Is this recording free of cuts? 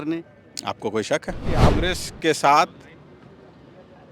no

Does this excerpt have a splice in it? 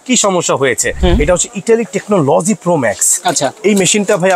yes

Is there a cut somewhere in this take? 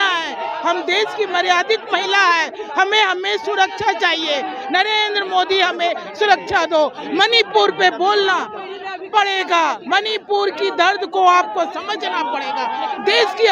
no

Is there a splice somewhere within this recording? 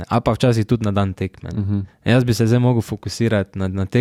no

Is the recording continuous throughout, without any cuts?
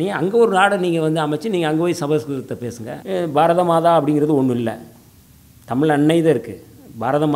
no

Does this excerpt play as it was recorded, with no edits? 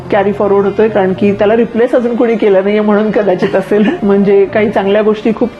no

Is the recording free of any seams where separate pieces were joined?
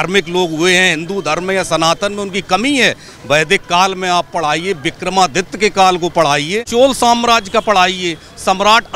no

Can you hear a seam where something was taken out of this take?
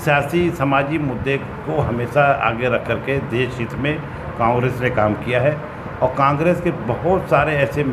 no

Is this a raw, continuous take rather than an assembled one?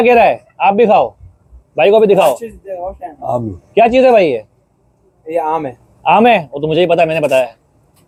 yes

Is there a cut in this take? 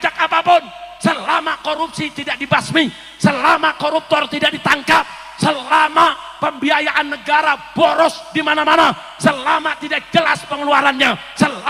no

